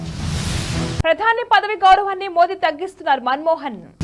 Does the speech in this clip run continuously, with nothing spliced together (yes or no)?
yes